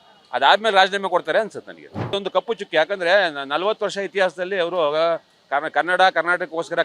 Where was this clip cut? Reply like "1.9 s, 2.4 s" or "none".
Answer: 2.1 s